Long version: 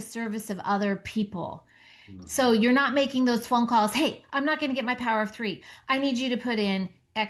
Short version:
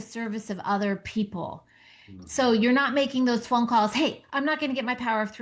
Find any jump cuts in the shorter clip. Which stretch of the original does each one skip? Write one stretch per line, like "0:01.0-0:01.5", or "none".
none